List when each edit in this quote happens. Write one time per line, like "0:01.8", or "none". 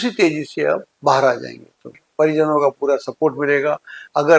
0:02.0